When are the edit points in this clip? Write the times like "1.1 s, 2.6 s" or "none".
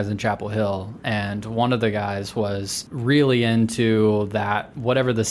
2.8 s